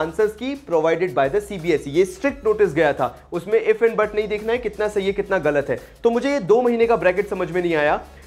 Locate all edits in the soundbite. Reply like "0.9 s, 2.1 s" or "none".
none